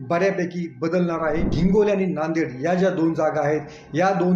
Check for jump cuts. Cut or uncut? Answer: cut